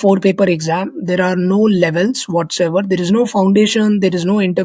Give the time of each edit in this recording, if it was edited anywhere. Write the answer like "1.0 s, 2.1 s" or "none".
none